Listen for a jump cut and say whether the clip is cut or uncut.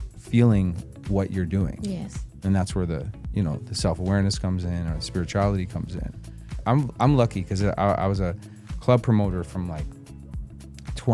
uncut